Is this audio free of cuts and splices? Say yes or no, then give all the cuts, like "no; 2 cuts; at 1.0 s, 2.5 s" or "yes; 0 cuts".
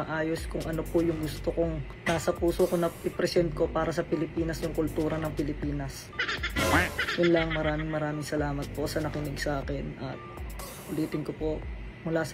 yes; 0 cuts